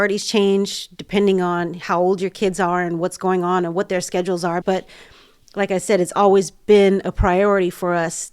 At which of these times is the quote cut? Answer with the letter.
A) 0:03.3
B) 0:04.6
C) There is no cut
B